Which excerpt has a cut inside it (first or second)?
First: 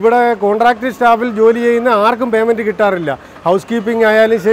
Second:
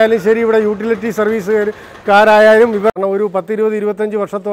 second